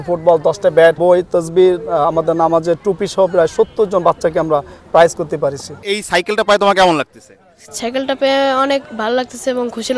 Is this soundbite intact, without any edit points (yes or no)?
no